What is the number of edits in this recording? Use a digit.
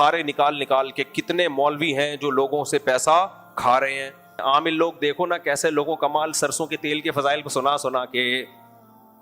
2